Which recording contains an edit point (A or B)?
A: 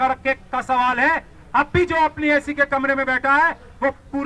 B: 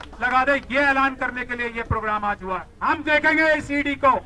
B